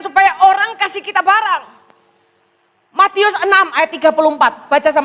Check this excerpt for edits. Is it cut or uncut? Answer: uncut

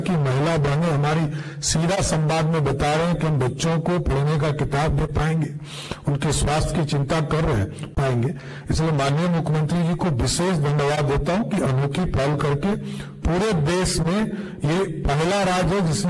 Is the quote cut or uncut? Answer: uncut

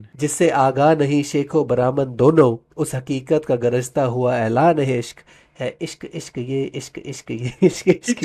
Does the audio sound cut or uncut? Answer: uncut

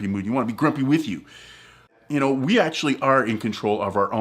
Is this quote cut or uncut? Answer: cut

